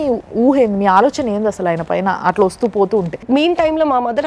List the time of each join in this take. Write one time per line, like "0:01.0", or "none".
0:03.1